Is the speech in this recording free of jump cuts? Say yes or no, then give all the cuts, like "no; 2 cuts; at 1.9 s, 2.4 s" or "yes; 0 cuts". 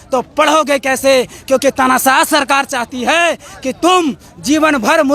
yes; 0 cuts